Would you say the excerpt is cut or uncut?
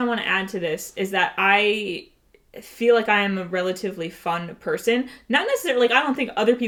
uncut